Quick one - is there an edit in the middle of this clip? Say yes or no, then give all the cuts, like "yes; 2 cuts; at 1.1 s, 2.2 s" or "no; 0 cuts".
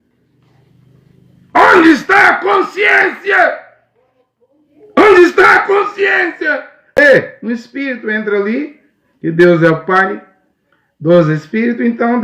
yes; 1 cut; at 7.0 s